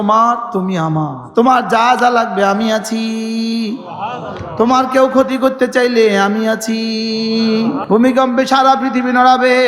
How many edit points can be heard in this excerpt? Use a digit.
2